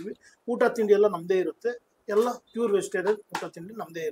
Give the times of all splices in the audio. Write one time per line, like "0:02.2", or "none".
none